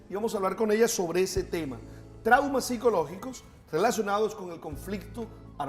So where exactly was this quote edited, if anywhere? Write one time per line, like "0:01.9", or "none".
0:00.9